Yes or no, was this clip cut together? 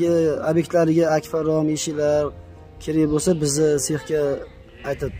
no